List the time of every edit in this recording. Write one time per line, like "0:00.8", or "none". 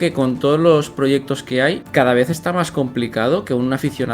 0:01.8